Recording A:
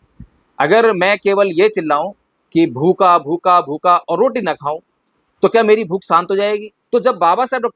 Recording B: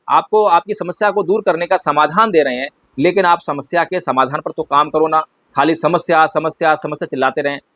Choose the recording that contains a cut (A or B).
A